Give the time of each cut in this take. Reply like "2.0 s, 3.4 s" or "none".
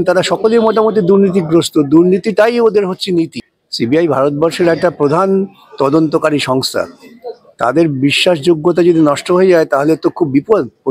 3.4 s

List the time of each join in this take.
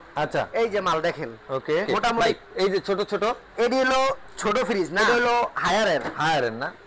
2.2 s, 5.0 s

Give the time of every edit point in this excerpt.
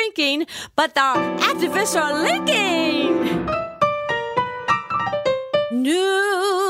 none

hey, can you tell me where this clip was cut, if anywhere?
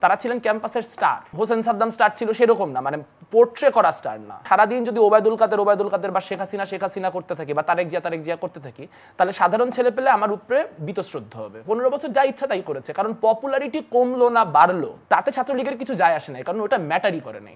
1.3 s, 4.4 s, 11.6 s, 14.9 s

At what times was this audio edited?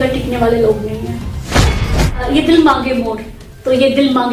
1.8 s

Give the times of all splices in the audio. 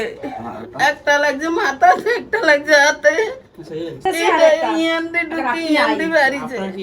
4.0 s

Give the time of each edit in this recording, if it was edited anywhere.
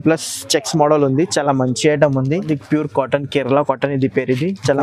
2.4 s

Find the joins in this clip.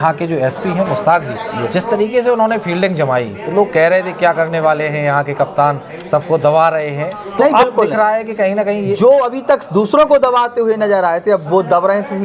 none

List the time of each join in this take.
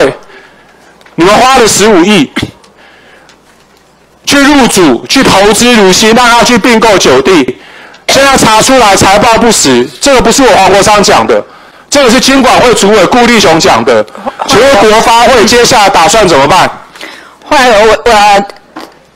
none

